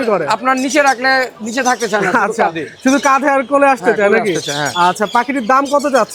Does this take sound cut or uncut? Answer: uncut